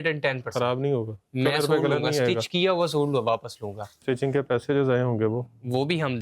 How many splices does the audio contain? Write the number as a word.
one